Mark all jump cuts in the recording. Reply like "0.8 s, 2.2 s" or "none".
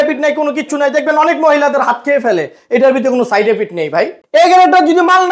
4.2 s